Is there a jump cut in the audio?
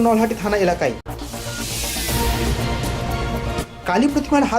yes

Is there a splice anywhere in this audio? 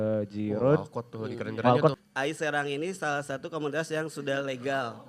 yes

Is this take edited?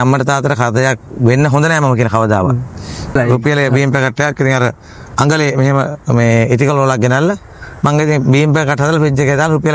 yes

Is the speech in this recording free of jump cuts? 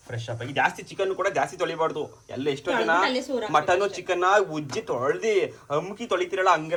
yes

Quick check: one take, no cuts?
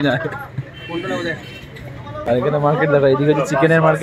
no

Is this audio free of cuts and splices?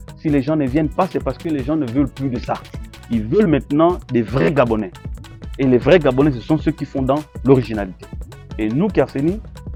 yes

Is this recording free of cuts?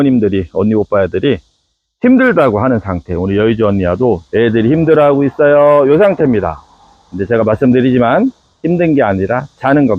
yes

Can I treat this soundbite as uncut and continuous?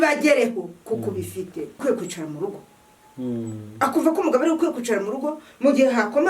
no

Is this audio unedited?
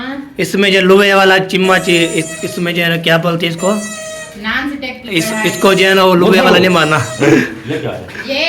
yes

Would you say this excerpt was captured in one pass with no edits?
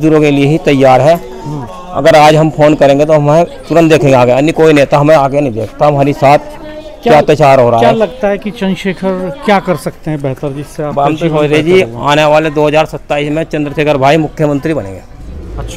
yes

